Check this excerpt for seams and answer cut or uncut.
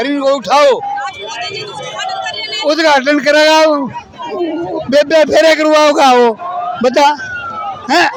uncut